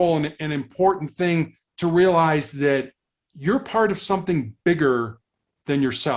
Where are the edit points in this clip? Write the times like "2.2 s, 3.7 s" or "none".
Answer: none